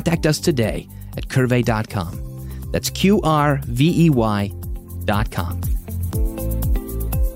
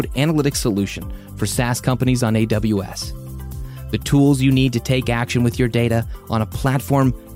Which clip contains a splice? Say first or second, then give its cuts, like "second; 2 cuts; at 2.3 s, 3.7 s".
first; 1 cut; at 5.5 s